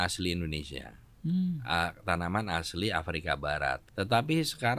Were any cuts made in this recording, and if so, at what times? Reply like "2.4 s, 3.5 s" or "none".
3.9 s

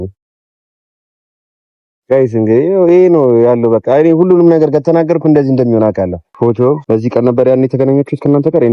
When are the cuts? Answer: 6.2 s, 6.8 s

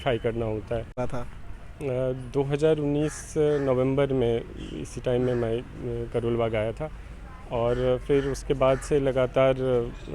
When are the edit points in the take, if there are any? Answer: 0.9 s

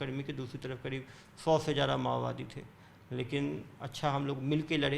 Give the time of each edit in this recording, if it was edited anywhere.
none

